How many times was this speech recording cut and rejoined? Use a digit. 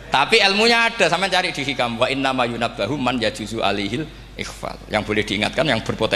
1